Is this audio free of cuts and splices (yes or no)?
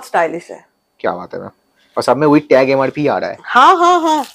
yes